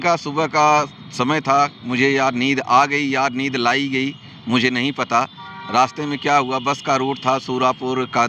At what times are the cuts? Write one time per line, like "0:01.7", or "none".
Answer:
none